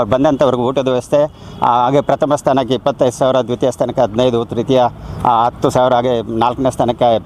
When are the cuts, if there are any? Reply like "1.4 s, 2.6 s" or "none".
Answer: none

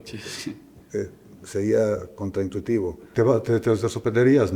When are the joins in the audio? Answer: 3.0 s

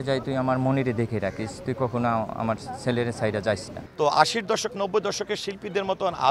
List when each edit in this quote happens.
3.8 s

